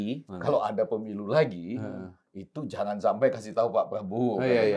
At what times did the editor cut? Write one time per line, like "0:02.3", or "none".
none